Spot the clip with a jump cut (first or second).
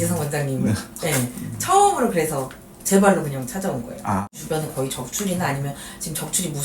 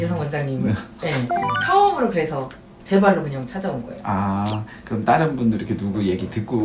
first